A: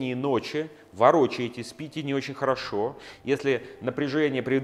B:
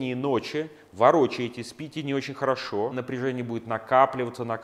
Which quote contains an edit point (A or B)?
B